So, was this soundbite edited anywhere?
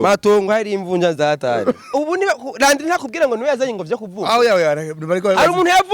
yes; 1 cut; at 1.9 s

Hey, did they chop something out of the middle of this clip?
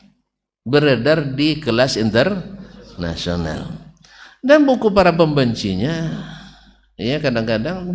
no; 0 cuts

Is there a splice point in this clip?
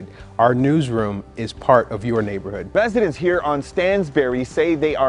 yes; 1 cut; at 2.6 s

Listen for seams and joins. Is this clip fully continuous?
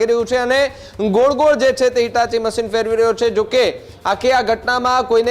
yes; 0 cuts

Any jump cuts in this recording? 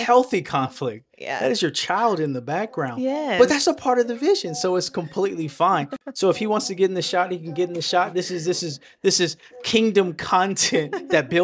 no; 0 cuts

